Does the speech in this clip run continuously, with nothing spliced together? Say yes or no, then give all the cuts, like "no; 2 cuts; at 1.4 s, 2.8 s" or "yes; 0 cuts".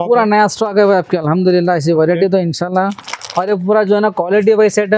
yes; 0 cuts